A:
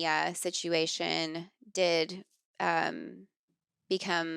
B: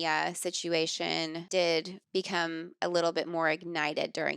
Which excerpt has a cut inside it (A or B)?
B